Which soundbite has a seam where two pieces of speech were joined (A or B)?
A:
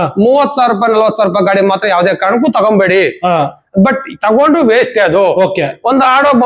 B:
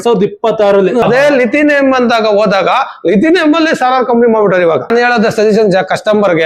B